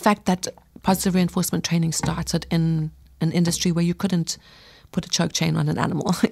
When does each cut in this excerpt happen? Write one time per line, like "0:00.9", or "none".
none